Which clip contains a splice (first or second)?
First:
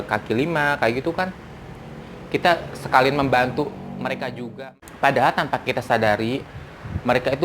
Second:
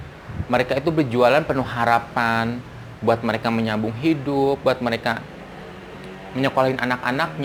first